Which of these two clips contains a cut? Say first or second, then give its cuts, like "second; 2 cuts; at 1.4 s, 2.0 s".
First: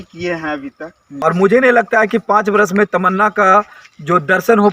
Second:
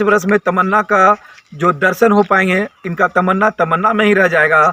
first; 1 cut; at 1.0 s